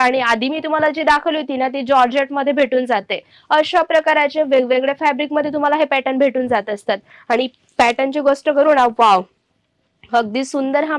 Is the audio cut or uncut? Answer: uncut